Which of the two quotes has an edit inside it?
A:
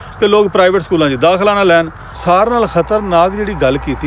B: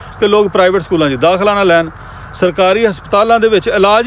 A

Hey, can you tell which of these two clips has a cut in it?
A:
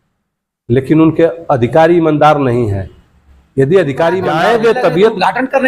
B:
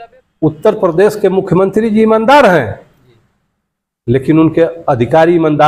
A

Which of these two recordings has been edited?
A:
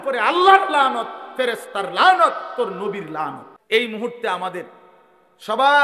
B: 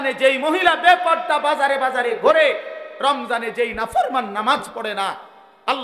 A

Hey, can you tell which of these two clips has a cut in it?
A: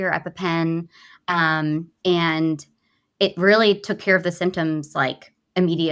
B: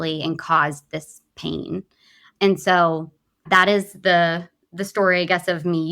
B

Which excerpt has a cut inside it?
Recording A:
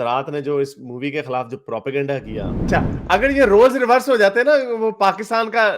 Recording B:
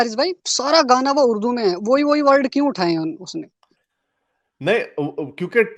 A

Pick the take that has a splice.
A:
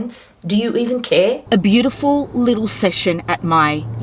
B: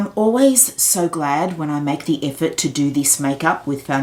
A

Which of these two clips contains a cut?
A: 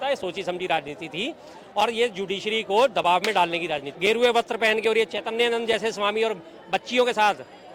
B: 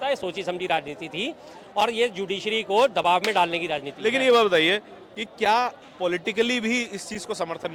A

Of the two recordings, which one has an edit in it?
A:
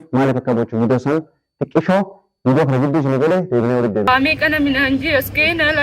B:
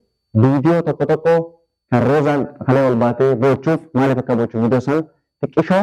A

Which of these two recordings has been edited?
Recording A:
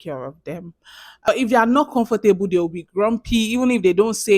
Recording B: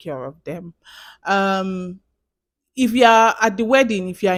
A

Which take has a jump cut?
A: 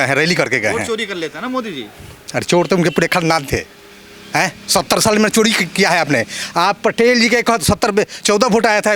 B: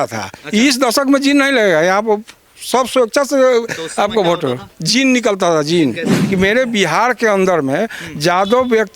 B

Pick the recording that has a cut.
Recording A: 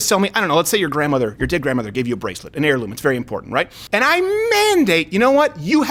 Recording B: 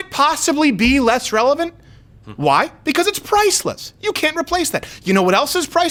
A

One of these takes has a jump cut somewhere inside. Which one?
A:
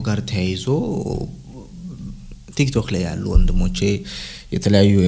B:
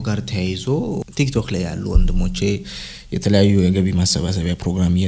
B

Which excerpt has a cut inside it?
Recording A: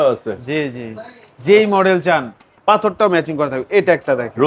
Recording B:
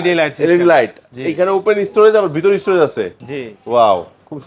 A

